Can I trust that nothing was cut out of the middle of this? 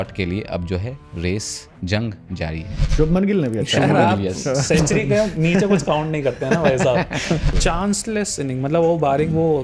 no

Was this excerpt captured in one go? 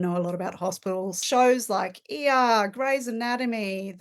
no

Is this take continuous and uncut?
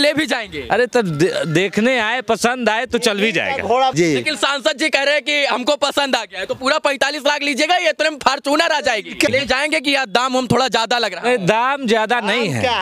no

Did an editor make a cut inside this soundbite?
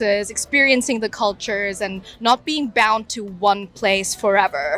no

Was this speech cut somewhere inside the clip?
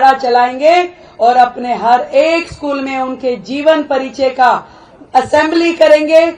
no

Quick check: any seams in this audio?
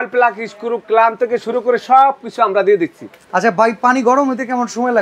no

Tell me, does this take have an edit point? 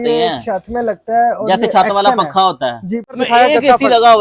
yes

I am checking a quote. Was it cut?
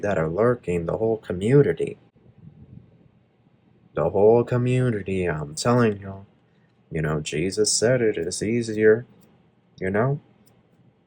no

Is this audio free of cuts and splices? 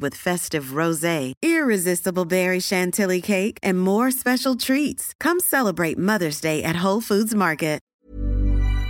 no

